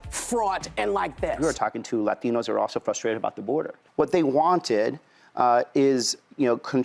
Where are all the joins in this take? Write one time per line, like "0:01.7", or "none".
0:01.4
0:03.8

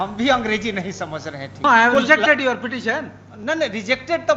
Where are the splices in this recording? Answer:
0:01.6

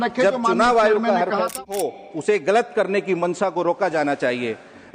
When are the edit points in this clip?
0:01.6

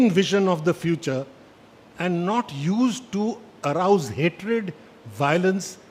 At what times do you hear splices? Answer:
none

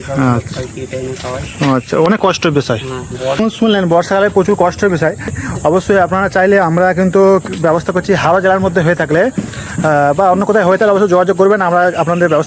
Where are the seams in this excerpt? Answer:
0:03.4
0:05.4

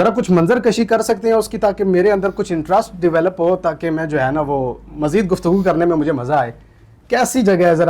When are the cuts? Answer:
none

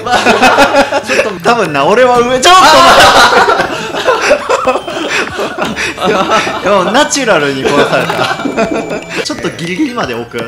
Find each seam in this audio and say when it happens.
0:01.3
0:09.2

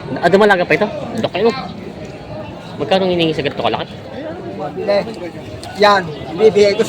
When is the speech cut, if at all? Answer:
0:04.6

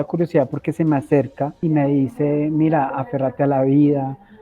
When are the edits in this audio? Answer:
0:01.6

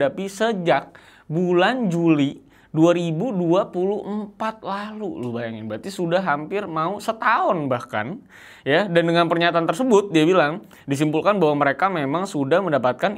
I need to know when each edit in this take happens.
none

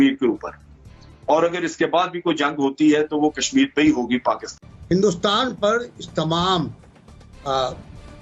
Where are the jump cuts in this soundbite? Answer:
0:04.8

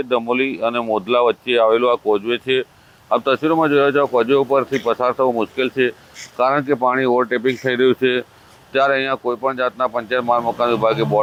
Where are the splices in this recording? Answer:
none

